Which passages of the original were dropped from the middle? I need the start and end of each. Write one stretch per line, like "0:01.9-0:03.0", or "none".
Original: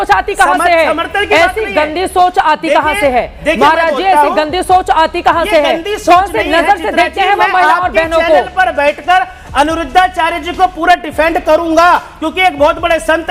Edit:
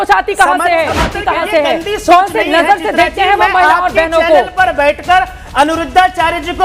0:01.1-0:05.1